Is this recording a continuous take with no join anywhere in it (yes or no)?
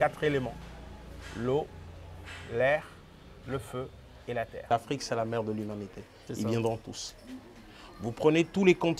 no